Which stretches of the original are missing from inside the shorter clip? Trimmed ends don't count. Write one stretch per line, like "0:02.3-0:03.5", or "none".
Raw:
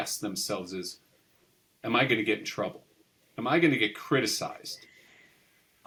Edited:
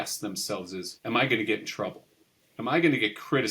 0:00.9-0:01.7